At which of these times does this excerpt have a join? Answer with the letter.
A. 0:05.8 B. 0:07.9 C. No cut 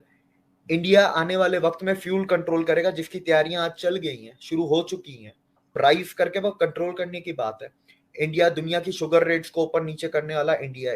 A